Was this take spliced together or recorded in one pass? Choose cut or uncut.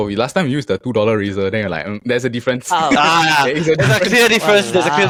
uncut